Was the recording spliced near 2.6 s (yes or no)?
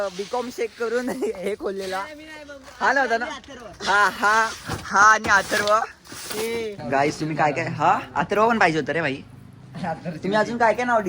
no